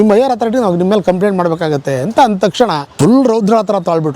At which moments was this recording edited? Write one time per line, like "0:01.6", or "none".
0:02.9

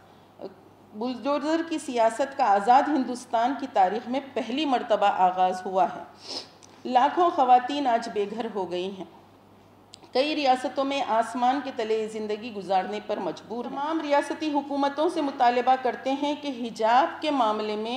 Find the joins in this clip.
0:13.8

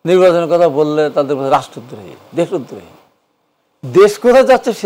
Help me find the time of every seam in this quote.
none

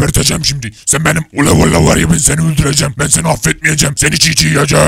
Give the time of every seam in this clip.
0:01.3

